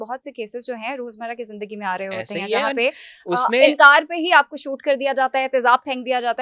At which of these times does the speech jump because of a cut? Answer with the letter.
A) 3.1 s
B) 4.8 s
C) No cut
C